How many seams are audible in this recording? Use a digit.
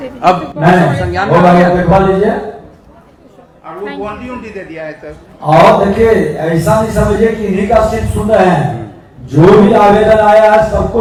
0